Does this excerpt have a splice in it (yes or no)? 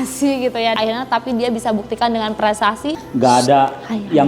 yes